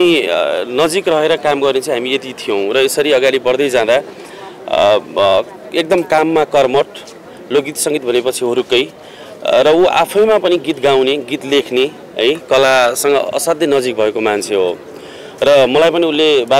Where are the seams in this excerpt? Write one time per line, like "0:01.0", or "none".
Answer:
none